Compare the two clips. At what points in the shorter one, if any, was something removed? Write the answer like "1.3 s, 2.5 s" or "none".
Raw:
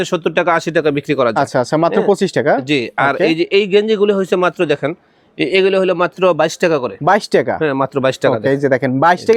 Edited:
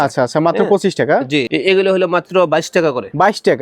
1.5 s